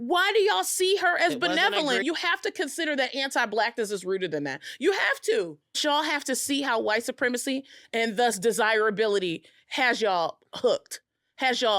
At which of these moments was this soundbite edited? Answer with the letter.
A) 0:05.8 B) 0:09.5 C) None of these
A